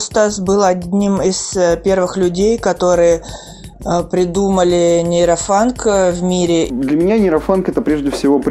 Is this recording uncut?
no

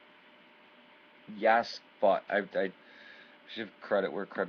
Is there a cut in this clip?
no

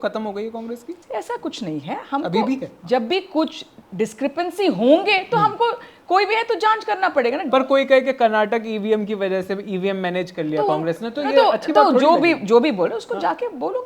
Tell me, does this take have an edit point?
yes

